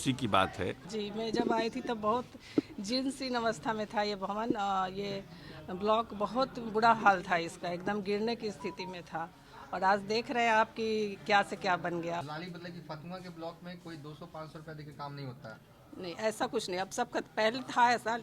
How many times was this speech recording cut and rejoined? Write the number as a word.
two